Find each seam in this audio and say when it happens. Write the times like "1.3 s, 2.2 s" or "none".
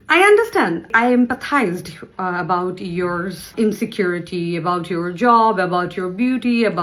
0.9 s, 3.5 s

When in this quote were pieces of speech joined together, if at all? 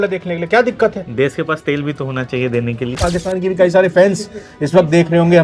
3.0 s

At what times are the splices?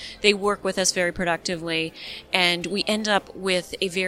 none

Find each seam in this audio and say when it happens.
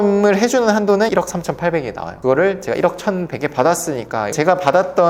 1.1 s, 4.3 s

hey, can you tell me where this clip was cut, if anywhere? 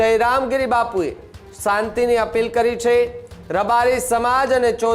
none

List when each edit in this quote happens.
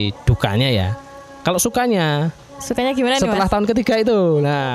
none

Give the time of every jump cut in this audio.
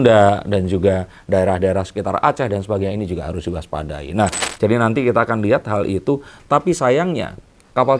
4.4 s

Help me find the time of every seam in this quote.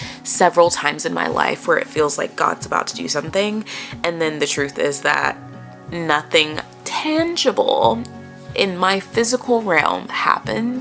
none

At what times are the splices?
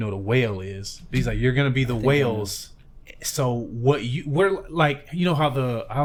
none

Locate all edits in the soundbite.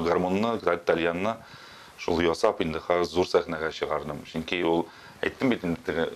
none

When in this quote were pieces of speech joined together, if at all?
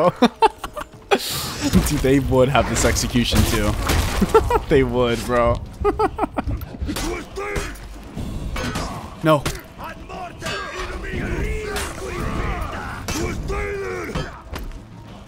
1.7 s, 7.0 s

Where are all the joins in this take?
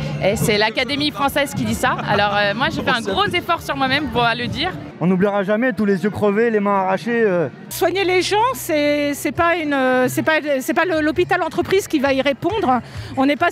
4.8 s, 7.6 s

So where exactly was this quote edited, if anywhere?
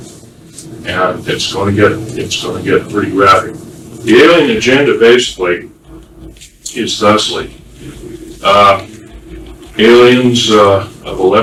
none

